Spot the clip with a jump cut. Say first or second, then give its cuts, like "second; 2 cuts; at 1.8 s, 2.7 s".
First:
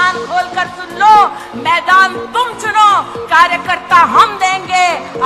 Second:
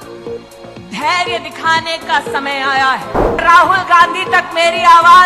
second; 2 cuts; at 0.9 s, 3.4 s